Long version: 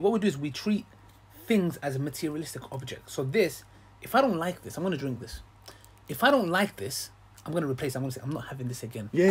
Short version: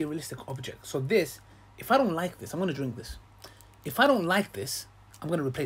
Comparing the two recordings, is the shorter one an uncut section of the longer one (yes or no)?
yes